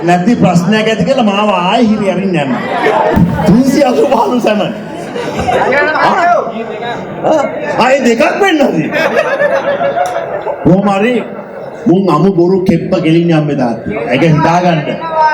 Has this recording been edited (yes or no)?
no